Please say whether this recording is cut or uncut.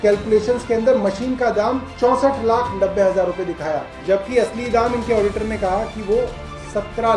uncut